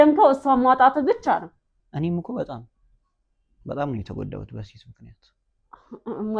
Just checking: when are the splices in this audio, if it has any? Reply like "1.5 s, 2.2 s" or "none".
1.8 s